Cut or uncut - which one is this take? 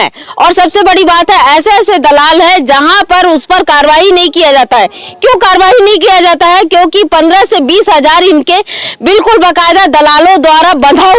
uncut